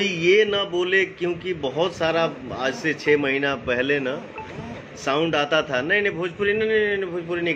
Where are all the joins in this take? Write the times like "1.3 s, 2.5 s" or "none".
none